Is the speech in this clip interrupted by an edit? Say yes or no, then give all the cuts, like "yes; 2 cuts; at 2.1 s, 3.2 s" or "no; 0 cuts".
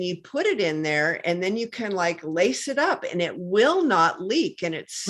no; 0 cuts